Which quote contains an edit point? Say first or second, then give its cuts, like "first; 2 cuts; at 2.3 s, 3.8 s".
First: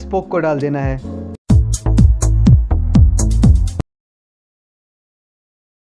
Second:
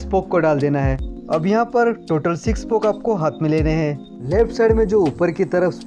second; 2 cuts; at 1.1 s, 4.1 s